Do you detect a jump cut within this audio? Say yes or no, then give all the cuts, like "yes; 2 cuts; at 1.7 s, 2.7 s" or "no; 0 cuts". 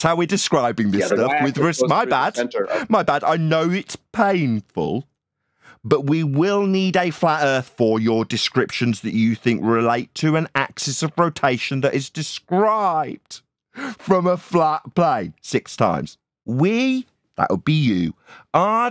yes; 1 cut; at 16.4 s